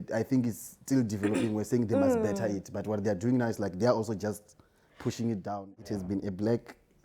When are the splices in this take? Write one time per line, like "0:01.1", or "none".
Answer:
0:05.5